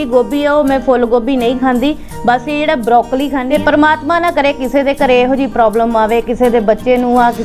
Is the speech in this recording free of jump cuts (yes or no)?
no